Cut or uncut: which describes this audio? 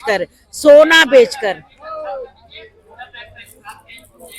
uncut